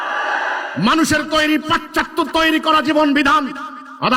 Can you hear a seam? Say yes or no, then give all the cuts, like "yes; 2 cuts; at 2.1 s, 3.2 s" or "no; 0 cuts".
no; 0 cuts